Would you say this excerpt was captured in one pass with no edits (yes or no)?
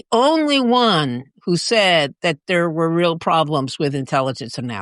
yes